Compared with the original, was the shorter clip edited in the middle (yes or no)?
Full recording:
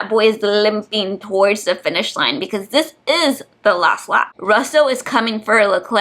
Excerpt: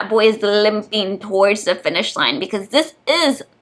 no